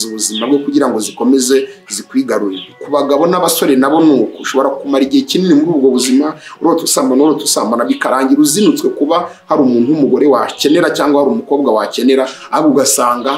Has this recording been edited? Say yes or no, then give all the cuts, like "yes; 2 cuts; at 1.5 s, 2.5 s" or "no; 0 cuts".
no; 0 cuts